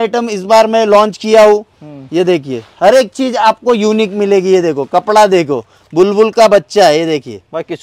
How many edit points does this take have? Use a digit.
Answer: 0